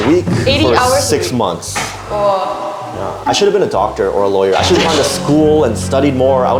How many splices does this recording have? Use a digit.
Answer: 0